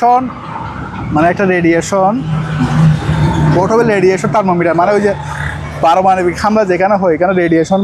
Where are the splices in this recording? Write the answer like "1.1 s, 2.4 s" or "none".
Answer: none